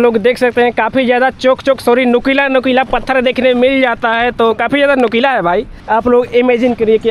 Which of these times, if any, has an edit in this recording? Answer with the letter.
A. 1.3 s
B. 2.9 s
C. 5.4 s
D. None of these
D